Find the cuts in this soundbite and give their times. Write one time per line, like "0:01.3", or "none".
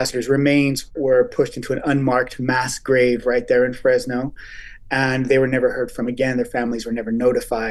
none